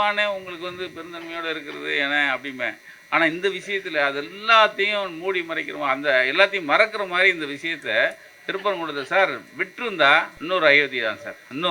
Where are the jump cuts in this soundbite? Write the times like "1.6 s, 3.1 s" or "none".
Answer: 10.3 s